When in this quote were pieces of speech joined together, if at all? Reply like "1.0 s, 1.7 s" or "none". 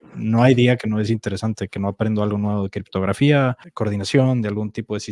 3.6 s